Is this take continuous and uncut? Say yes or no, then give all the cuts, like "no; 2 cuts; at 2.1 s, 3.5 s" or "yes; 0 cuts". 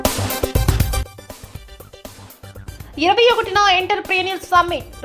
no; 2 cuts; at 1.0 s, 2.6 s